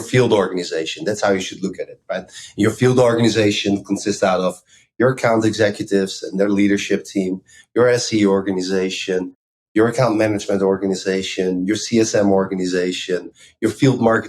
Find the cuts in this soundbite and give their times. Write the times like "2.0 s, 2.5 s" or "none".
13.4 s